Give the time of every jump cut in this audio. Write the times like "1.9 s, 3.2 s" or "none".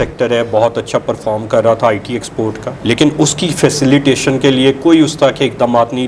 none